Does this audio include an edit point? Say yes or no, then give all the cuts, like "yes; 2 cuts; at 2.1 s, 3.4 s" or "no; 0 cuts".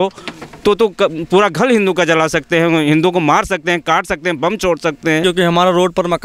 yes; 1 cut; at 5.2 s